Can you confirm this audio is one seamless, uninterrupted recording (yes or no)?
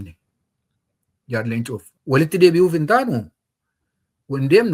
no